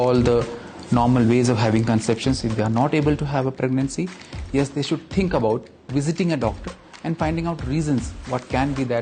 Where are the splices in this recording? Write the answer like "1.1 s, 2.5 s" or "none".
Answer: none